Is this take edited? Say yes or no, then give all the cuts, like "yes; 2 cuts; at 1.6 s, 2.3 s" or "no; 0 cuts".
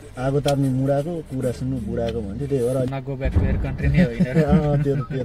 yes; 1 cut; at 2.9 s